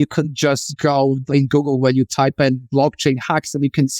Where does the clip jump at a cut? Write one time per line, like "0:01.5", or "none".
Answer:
0:01.2